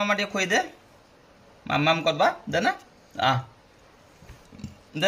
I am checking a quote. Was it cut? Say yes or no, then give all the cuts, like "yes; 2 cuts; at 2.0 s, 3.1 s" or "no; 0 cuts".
no; 0 cuts